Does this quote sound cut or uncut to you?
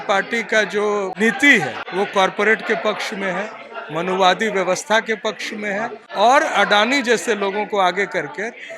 cut